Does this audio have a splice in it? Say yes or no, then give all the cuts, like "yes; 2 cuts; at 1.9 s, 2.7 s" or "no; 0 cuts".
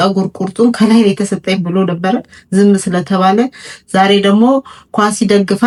no; 0 cuts